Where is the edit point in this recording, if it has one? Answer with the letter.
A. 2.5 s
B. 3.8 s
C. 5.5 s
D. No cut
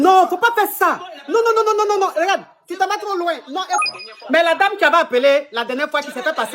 B